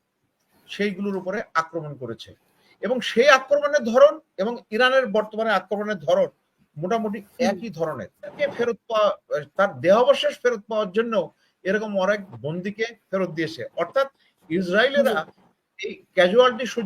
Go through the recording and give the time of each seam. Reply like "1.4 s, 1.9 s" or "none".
8.3 s